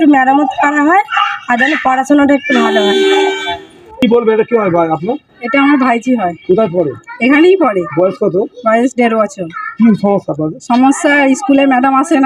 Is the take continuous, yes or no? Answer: yes